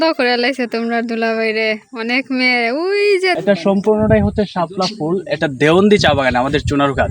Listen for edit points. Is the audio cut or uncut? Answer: cut